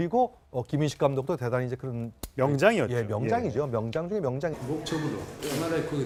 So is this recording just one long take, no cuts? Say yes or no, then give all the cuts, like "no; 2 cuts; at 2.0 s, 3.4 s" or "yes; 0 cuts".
yes; 0 cuts